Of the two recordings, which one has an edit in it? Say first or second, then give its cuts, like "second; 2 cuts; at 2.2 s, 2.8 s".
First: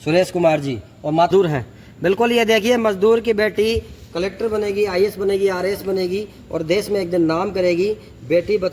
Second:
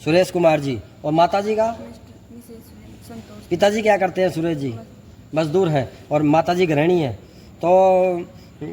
first; 1 cut; at 1.3 s